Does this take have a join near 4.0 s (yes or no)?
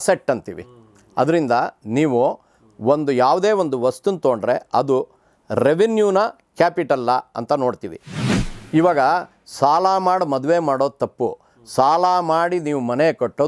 no